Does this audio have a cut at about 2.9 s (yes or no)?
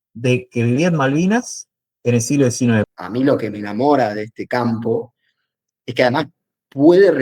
yes